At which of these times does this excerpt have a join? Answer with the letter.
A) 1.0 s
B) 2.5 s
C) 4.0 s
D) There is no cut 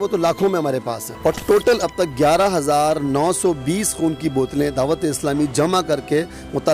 A